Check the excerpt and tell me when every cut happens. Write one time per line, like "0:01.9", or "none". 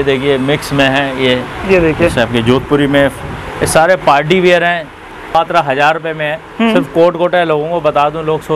none